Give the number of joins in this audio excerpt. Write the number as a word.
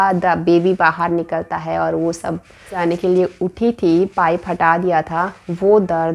one